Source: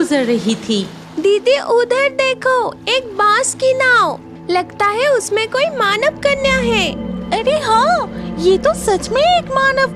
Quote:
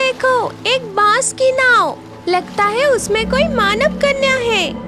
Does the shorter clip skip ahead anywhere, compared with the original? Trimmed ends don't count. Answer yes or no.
no